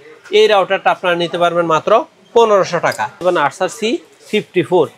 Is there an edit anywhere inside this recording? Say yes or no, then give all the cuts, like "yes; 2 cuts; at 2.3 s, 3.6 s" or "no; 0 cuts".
yes; 1 cut; at 3.2 s